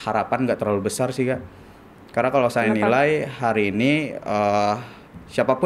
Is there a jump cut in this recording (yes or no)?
no